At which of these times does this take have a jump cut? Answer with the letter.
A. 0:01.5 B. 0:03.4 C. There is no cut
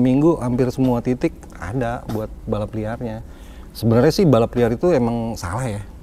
C